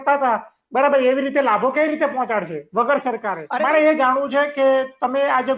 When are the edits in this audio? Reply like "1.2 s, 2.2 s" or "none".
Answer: 3.4 s